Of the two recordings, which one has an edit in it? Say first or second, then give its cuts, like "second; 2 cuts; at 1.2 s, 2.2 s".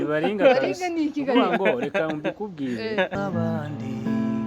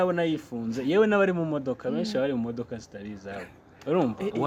first; 1 cut; at 3.1 s